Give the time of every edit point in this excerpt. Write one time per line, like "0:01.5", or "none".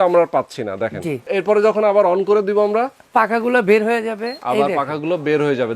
0:01.3